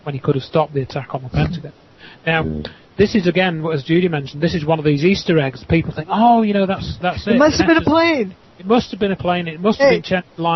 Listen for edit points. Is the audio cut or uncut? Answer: uncut